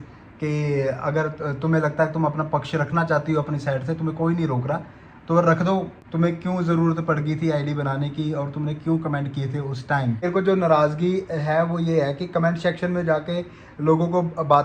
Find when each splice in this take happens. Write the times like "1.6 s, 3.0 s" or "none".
6.0 s, 10.2 s